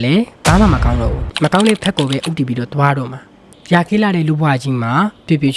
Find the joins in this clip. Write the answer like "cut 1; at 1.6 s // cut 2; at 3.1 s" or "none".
cut 1; at 1.2 s // cut 2; at 3.5 s